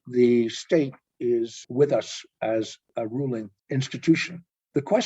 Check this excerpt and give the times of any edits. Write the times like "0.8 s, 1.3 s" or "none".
1.6 s, 3.2 s